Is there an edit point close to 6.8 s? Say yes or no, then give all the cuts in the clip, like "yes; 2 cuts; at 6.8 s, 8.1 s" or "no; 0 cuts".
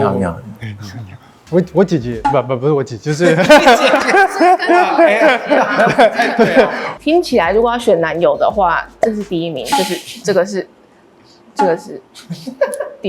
yes; 1 cut; at 6.8 s